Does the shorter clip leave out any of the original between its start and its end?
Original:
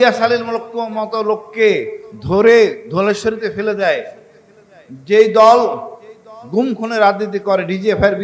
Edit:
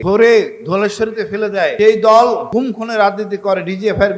yes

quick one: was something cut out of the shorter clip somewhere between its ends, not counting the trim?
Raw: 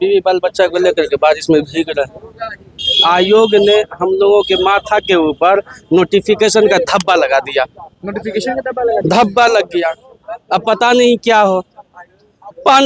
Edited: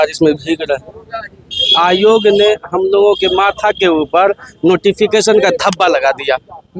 no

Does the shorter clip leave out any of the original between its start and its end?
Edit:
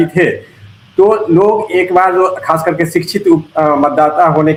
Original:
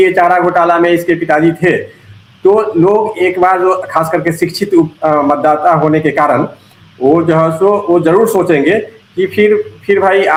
no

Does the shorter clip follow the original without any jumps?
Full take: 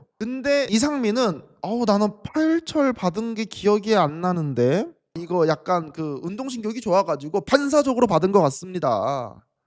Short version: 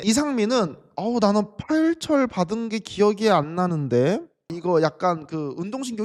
yes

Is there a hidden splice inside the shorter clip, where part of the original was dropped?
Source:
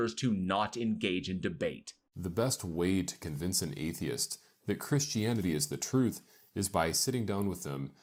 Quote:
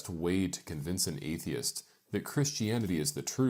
no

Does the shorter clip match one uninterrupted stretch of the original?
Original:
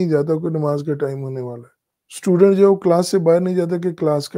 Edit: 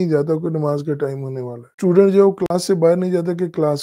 no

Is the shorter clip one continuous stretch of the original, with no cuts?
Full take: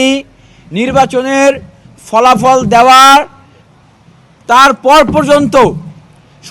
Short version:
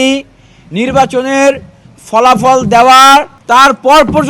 no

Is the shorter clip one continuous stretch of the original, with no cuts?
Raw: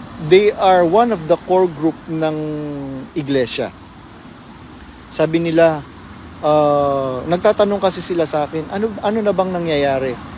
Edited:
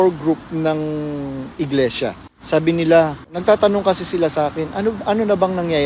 no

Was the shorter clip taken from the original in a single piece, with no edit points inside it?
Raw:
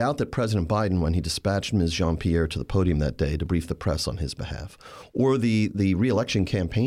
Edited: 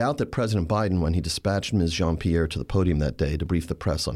yes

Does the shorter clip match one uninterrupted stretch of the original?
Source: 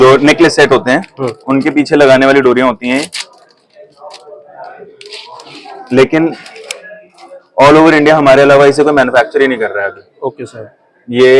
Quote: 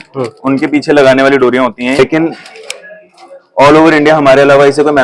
no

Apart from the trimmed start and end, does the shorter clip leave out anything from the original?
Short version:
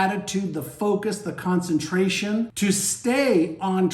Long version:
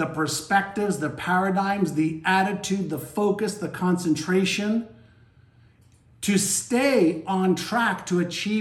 yes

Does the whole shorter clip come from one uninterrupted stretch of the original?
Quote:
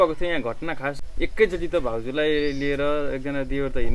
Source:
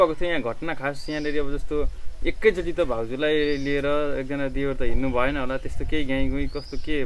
no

